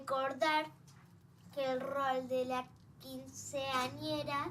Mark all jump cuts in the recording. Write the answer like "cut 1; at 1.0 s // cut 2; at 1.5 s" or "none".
none